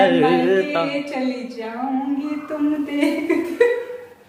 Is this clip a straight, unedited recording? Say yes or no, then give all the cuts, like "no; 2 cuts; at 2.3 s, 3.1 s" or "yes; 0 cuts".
yes; 0 cuts